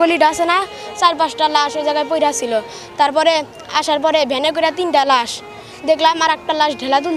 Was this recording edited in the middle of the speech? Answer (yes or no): no